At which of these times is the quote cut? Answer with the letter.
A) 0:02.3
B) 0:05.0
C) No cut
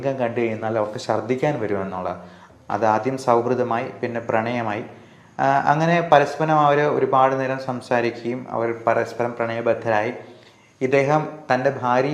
A